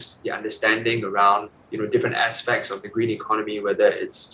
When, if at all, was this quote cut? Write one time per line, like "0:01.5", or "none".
0:01.6